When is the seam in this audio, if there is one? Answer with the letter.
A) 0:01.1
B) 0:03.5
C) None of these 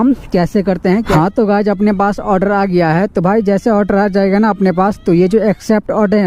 A